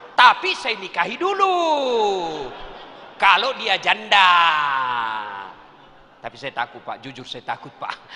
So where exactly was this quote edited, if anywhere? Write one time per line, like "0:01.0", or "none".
none